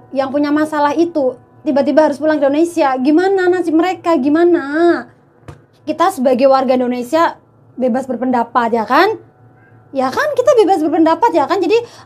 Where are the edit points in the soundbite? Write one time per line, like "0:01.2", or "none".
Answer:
0:05.8